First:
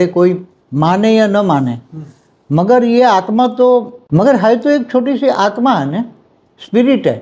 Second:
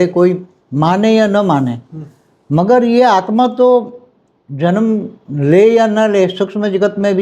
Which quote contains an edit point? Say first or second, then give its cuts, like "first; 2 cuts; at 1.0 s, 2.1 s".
first; 1 cut; at 4.0 s